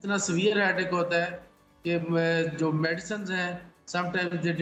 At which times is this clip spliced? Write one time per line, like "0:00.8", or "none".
none

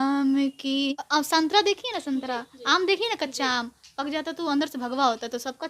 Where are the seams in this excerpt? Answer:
0:01.0

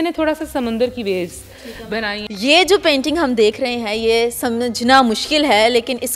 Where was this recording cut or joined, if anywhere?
0:02.2

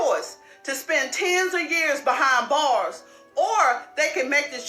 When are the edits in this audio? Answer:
none

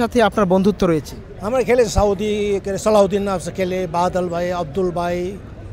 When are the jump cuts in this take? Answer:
none

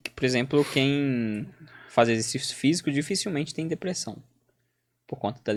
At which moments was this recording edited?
none

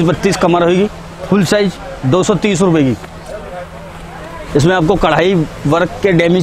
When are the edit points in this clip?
none

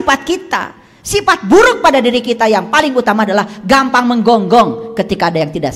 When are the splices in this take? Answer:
none

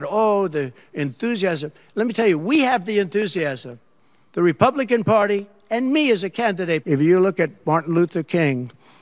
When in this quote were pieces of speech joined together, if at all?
0:06.8

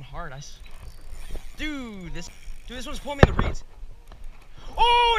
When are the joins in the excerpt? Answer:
0:02.2

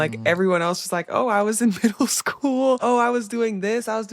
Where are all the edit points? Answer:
0:02.8

